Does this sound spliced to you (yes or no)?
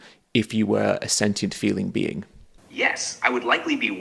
no